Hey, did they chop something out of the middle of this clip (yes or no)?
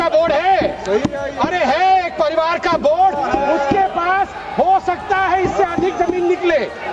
no